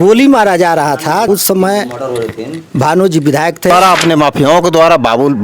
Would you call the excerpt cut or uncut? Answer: cut